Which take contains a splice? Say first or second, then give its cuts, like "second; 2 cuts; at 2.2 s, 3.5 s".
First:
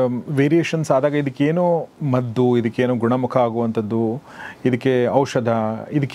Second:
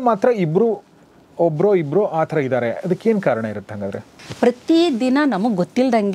second; 1 cut; at 4.1 s